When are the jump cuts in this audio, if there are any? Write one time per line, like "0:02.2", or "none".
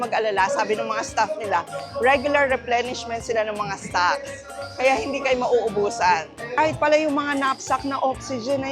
0:06.4